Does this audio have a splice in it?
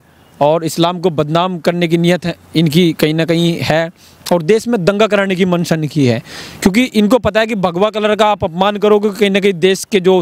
no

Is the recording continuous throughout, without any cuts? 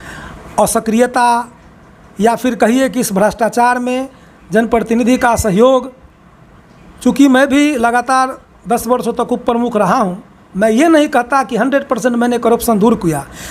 yes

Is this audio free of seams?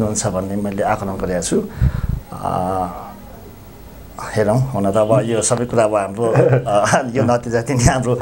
yes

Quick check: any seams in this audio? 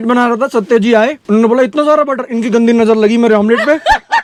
no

